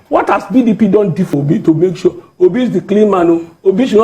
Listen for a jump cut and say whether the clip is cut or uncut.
cut